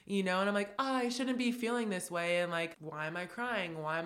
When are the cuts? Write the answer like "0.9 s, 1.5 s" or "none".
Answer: 2.7 s